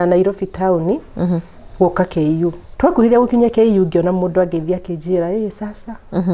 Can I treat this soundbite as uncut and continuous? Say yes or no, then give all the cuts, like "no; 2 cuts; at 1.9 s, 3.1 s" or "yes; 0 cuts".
no; 1 cut; at 2.6 s